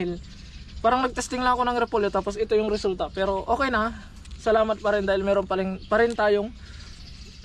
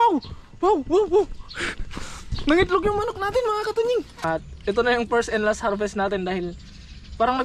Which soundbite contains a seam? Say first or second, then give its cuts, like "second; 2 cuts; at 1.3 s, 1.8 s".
second; 1 cut; at 4.1 s